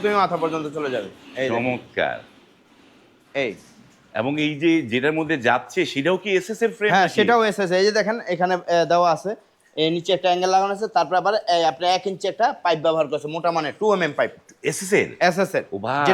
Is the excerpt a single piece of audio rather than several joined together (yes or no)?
yes